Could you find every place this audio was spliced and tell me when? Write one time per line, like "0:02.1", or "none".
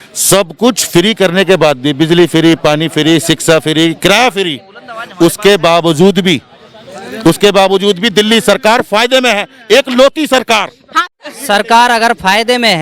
0:11.0